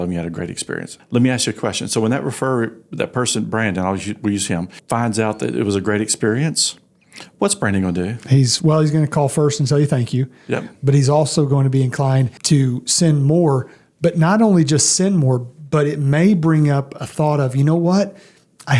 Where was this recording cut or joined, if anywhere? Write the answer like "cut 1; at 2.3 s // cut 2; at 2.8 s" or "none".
cut 1; at 0.9 s // cut 2; at 4.8 s // cut 3; at 12.3 s